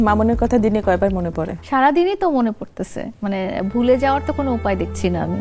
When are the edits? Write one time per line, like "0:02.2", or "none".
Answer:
0:01.5